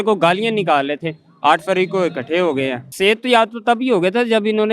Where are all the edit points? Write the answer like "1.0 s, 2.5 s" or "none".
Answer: 2.9 s